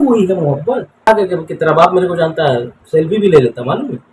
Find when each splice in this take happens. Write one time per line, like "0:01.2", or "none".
0:01.1